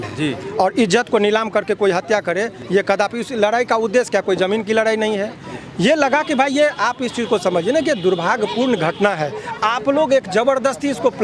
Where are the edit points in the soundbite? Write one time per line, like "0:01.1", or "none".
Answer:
none

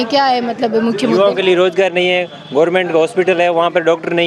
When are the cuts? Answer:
none

